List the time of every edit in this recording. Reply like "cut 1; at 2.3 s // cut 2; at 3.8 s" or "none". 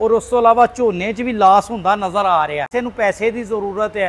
cut 1; at 2.7 s